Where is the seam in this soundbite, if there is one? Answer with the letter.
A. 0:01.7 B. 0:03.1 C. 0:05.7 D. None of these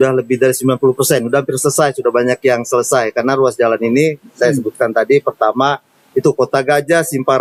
D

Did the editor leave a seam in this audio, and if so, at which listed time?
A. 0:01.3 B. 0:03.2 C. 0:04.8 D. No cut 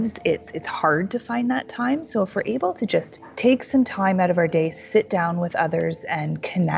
B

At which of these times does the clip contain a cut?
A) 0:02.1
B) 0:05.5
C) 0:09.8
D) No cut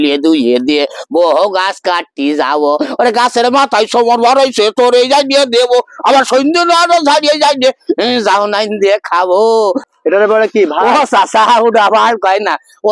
C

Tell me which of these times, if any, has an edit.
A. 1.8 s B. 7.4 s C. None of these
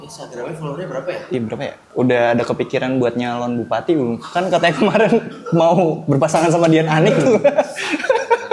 A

